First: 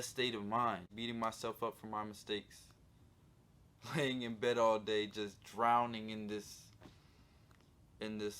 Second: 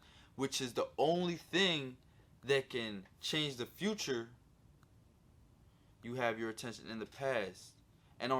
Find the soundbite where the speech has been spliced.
first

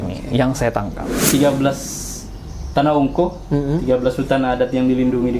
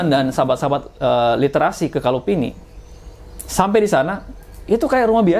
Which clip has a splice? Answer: first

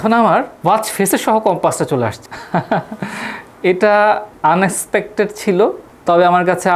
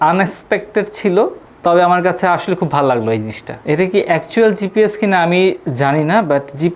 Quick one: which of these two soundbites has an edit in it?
second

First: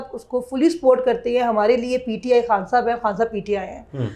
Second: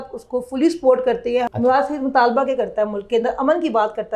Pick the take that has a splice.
second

